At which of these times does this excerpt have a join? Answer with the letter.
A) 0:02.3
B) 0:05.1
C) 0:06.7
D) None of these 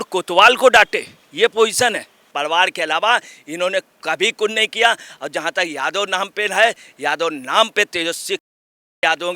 A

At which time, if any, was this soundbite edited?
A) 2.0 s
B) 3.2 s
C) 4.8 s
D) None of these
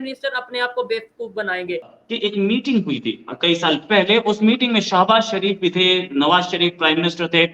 A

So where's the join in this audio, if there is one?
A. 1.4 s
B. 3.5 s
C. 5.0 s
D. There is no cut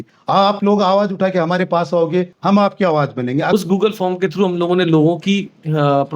B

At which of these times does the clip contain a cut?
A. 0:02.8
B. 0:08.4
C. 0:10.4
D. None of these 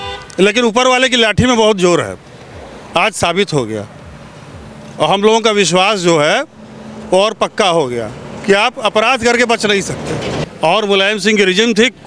C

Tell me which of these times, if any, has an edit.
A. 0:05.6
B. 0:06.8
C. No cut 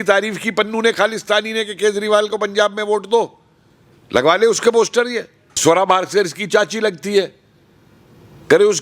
A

